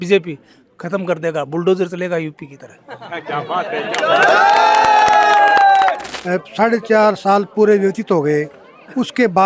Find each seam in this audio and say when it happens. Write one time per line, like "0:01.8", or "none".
0:06.0